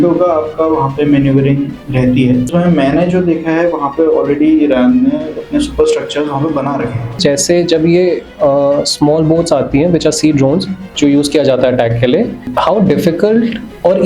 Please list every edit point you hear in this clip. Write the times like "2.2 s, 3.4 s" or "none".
2.5 s, 7.2 s, 12.5 s